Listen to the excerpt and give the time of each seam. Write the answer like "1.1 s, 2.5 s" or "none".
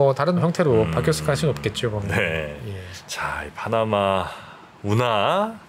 none